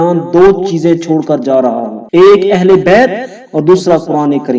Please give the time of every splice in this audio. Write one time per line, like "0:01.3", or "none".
none